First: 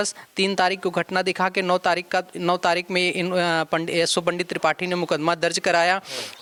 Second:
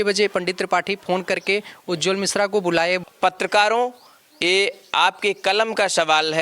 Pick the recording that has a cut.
second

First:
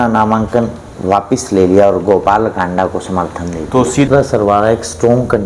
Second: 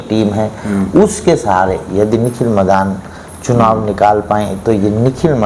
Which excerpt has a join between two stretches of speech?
first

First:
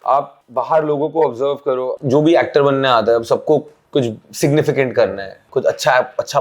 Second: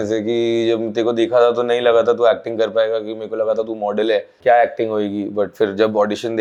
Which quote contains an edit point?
first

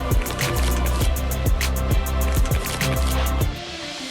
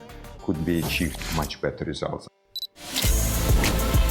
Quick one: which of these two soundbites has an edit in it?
second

